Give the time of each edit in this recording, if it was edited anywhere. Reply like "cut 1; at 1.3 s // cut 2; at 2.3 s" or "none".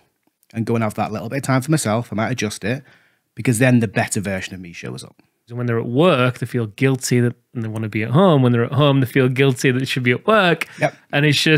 cut 1; at 5.6 s